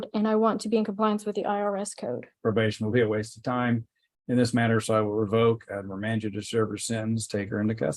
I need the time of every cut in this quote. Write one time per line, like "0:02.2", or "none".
0:02.3